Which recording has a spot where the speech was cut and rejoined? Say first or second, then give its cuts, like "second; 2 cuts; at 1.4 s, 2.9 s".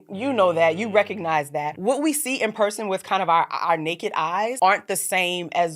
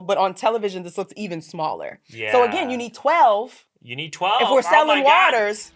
first; 2 cuts; at 1.7 s, 4.5 s